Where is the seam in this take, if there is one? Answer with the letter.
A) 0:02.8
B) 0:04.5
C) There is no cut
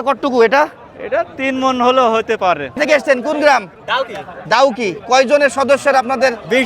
A